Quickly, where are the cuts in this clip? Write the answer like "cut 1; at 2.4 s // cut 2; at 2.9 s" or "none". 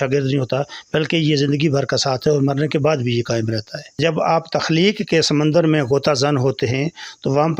cut 1; at 3.9 s